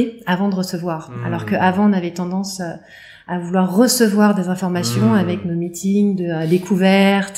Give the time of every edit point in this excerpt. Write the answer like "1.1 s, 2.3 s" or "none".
none